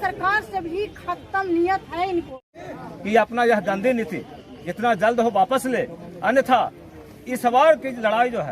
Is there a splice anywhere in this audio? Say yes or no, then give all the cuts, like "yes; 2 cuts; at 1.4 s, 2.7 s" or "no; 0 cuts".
yes; 1 cut; at 2.3 s